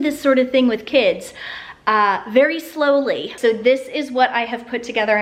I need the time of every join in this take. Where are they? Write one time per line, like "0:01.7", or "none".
none

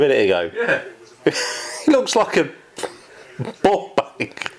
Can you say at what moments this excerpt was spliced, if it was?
none

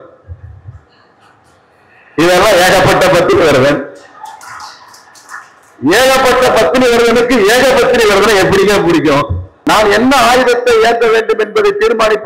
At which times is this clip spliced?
0:09.6

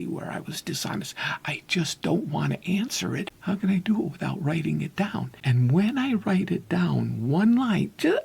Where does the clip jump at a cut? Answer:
0:03.3
0:05.3

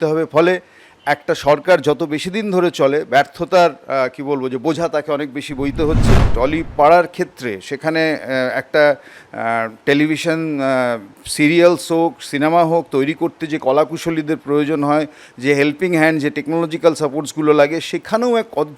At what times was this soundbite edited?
0:06.3

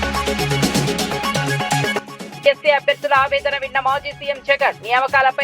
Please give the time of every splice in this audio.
0:02.2

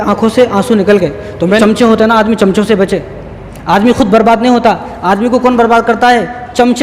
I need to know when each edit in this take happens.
0:01.6

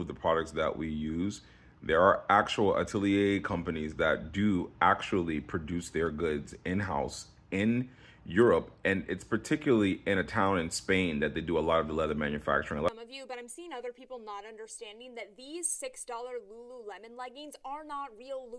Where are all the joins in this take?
0:12.9

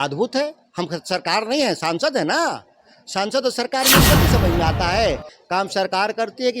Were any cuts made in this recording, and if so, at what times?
0:05.3

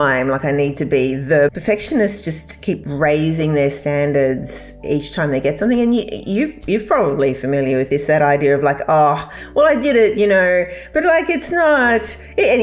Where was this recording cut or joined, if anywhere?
0:01.5

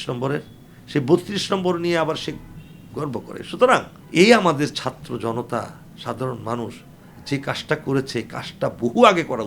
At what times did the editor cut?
0:04.0

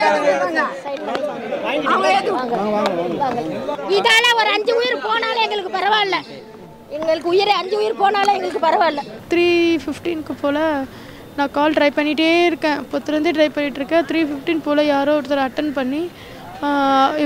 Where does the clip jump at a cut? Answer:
0:03.7
0:09.1

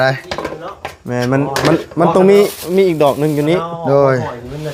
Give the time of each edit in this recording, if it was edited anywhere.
none

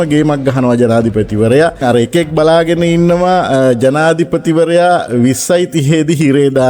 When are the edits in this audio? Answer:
0:01.8

